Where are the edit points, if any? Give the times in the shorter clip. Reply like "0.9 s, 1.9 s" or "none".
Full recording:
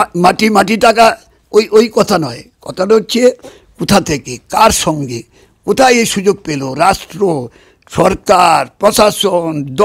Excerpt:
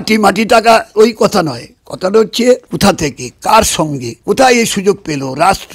0.9 s, 2.7 s, 4.1 s